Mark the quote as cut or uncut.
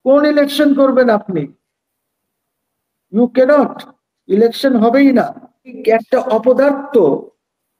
cut